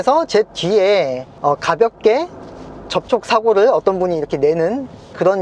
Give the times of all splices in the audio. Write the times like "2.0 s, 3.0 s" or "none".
1.2 s